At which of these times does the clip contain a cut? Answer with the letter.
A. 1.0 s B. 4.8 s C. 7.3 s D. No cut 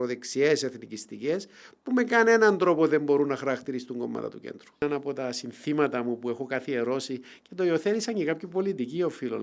B